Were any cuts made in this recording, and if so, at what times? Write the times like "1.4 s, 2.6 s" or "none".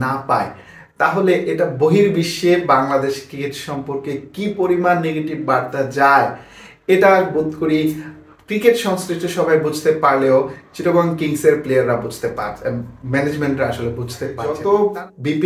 14.5 s